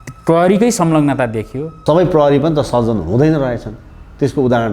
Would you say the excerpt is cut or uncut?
cut